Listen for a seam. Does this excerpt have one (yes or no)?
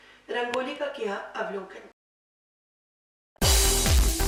no